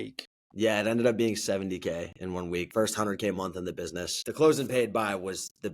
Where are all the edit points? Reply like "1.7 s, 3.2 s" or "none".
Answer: 2.7 s, 4.2 s